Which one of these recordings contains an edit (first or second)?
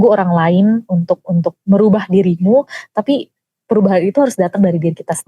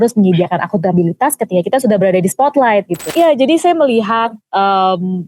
second